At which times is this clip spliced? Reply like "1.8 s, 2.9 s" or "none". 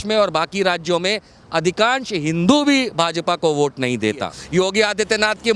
4.4 s